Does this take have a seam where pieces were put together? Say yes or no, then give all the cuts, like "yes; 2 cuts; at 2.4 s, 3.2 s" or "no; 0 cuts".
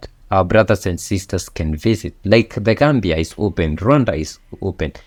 no; 0 cuts